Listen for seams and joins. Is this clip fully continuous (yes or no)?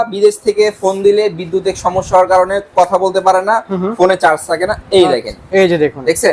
yes